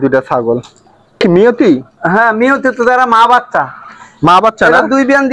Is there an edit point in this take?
yes; 1 cut; at 1.2 s

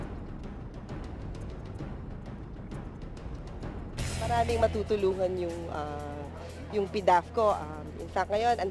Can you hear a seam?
yes; 1 cut; at 3.9 s

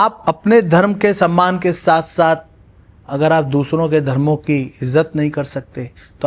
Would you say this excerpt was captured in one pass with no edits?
yes; 0 cuts

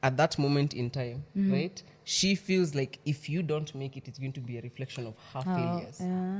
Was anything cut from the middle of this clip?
no; 0 cuts

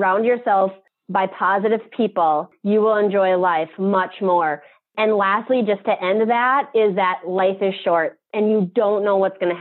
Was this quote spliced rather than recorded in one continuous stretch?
no; 0 cuts

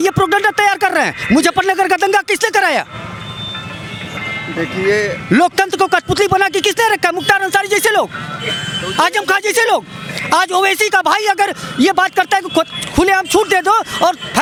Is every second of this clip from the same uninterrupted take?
yes; 0 cuts

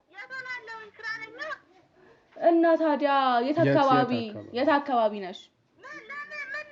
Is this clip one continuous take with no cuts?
yes; 0 cuts

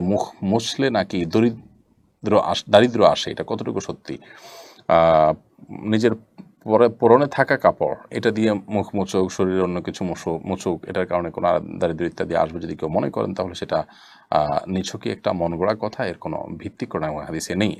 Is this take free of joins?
yes; 0 cuts

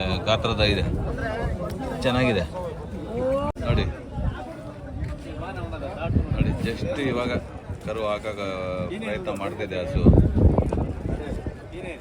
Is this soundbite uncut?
no; 1 cut; at 3.5 s

